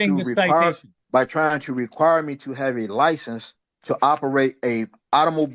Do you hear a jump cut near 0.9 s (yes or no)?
yes